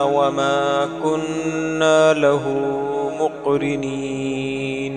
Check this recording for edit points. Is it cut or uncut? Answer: uncut